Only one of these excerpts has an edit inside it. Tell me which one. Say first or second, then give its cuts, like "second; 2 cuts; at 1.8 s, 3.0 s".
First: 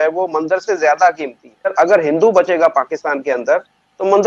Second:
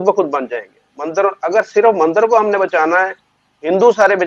first; 1 cut; at 1.7 s